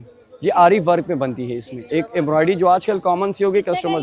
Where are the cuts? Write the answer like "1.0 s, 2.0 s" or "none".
none